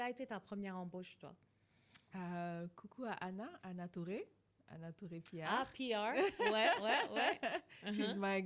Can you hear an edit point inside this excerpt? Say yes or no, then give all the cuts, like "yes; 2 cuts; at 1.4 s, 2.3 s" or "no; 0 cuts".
no; 0 cuts